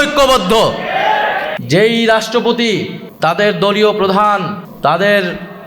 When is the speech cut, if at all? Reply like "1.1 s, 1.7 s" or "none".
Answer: 1.5 s, 3.0 s, 4.6 s